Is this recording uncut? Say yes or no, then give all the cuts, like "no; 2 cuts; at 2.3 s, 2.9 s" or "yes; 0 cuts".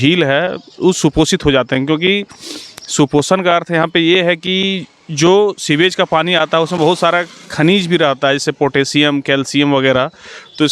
yes; 0 cuts